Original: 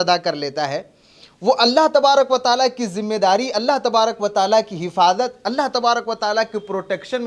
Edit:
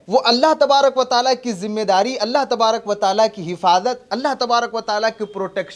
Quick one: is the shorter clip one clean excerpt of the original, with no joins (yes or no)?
yes